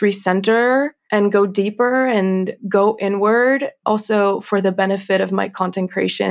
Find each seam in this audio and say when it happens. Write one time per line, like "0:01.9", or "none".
0:01.0
0:02.6
0:03.8